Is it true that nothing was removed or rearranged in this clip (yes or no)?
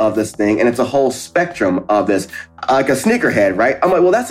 no